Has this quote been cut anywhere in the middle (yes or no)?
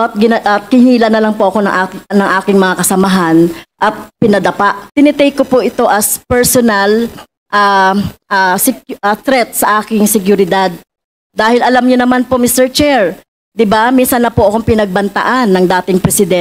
yes